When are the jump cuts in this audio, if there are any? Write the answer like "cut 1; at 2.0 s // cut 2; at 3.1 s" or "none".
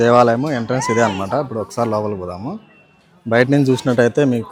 none